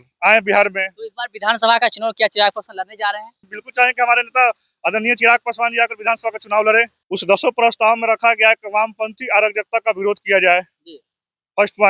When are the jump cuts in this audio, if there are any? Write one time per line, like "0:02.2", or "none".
0:03.6
0:07.0